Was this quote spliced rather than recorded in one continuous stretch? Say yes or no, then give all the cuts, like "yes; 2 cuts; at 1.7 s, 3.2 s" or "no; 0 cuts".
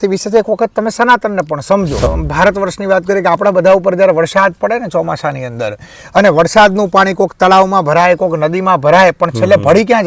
yes; 1 cut; at 2.1 s